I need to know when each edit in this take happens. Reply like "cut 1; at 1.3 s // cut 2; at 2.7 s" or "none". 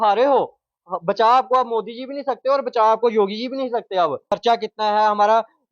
cut 1; at 4.3 s